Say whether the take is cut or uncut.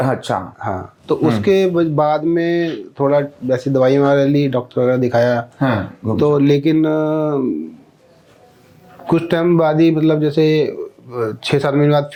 uncut